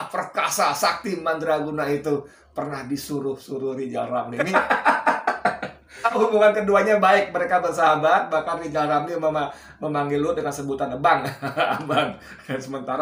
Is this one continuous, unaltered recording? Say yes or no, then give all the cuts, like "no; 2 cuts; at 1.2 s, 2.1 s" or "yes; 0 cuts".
no; 2 cuts; at 4.4 s, 6.2 s